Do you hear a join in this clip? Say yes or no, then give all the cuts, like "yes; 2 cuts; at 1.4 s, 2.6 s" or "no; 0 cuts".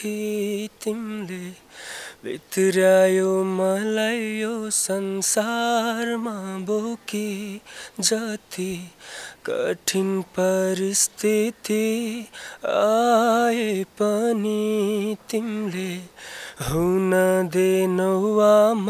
no; 0 cuts